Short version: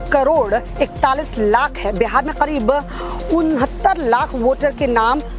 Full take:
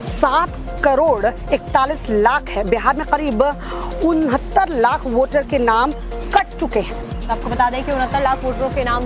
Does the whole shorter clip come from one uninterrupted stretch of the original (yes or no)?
yes